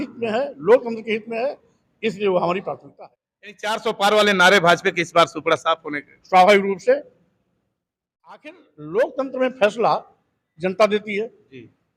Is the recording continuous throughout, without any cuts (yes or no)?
no